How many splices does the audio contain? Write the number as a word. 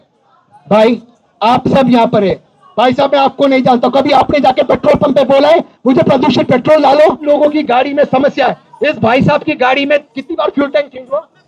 one